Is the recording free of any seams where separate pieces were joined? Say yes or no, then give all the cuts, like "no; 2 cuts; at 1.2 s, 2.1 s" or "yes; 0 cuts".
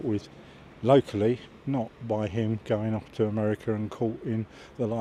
yes; 0 cuts